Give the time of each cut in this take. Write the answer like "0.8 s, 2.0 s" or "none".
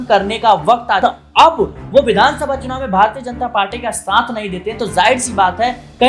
1.0 s